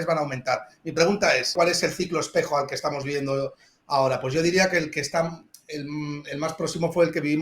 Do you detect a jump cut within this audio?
yes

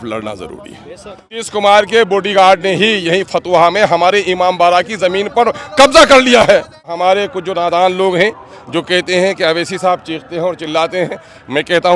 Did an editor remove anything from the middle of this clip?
yes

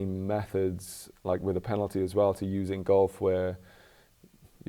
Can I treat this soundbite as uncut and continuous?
yes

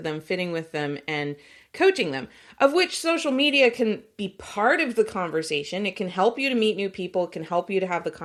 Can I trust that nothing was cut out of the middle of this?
yes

